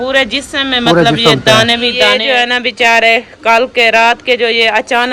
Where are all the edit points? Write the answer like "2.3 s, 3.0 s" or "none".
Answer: 2.1 s

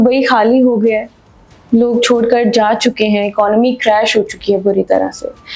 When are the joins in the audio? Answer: none

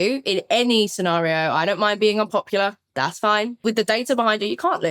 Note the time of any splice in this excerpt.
3.6 s

